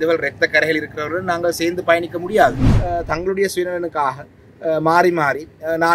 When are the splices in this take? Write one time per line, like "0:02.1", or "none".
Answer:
0:02.7